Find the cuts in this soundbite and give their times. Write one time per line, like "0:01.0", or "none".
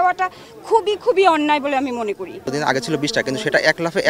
0:02.5